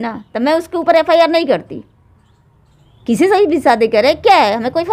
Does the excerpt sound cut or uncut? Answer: uncut